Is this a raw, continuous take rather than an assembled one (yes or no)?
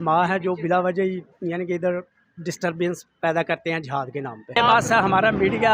no